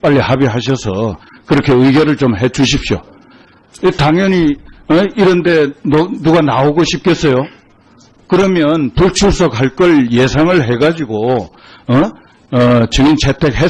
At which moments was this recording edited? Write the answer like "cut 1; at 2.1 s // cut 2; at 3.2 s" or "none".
none

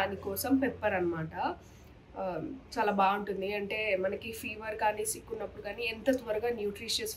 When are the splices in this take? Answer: none

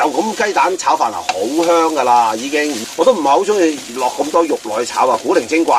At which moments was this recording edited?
cut 1; at 2.8 s

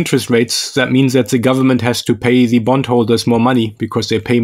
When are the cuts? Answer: none

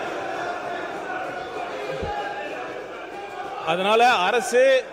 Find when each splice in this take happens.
none

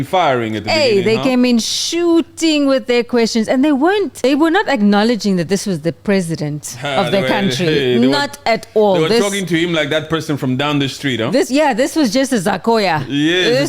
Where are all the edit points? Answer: cut 1; at 4.1 s

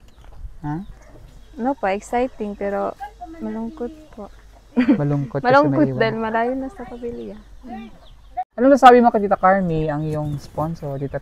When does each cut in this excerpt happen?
cut 1; at 8.4 s

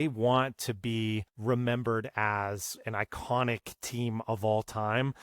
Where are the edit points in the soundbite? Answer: cut 1; at 1.3 s

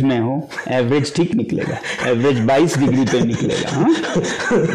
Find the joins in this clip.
none

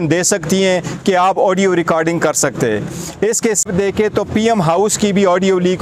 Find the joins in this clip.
cut 1; at 3.7 s

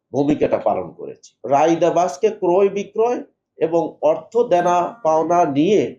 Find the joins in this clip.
cut 1; at 1.3 s

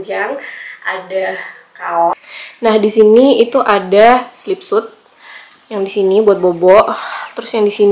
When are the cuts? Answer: cut 1; at 2.1 s

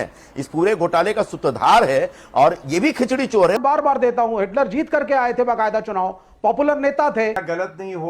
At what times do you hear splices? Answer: cut 1; at 3.5 s // cut 2; at 7.3 s

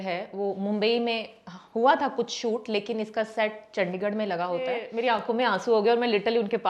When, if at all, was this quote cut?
cut 1; at 4.9 s

